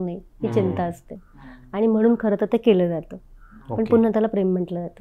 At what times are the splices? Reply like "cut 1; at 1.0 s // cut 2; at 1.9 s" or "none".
none

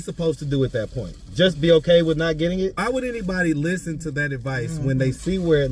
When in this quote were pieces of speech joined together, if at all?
cut 1; at 2.8 s

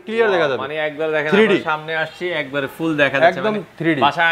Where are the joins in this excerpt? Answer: none

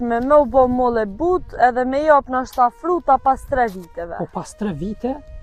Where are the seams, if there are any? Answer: none

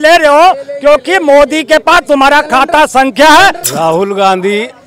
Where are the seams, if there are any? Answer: cut 1; at 3.6 s

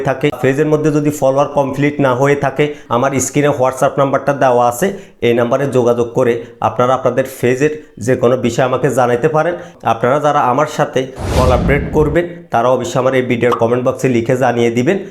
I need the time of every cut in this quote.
cut 1; at 2.8 s // cut 2; at 9.7 s

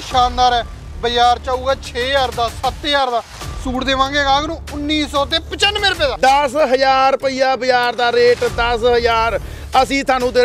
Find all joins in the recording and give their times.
cut 1; at 6.1 s

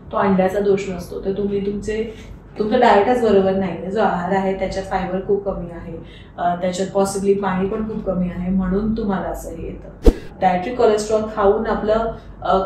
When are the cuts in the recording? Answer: cut 1; at 10.3 s

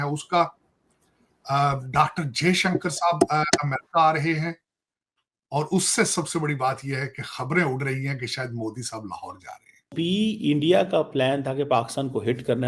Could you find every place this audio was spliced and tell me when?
cut 1; at 9.8 s

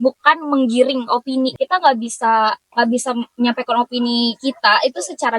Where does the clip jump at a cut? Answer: cut 1; at 1.5 s

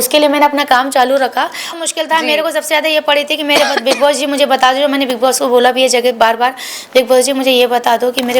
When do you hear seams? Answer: cut 1; at 1.7 s

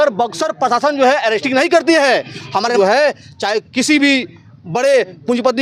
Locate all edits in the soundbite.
cut 1; at 2.7 s

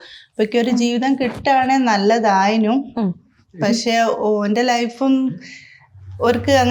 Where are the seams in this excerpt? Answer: none

